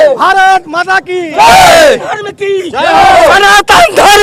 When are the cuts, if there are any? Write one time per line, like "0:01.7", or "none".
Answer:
none